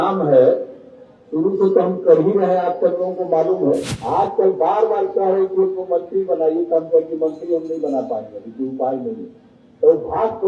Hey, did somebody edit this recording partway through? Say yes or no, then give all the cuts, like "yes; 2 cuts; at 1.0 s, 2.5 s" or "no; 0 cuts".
yes; 1 cut; at 3.9 s